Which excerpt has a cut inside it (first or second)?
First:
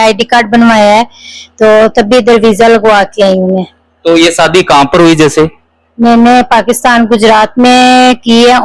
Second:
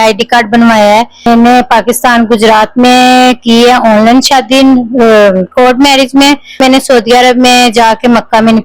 second